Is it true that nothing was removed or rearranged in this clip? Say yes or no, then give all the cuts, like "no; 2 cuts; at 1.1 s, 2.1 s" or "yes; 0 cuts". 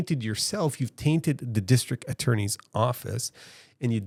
yes; 0 cuts